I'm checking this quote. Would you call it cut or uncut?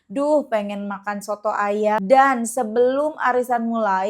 cut